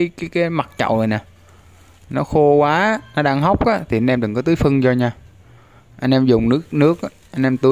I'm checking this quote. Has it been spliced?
no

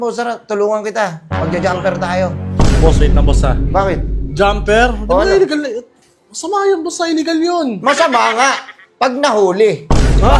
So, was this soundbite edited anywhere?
no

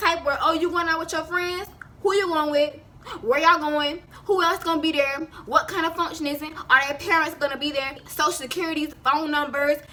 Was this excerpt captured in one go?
yes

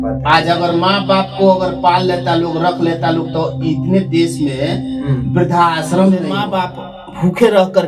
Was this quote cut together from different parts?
yes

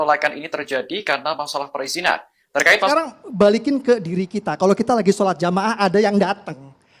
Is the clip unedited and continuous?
no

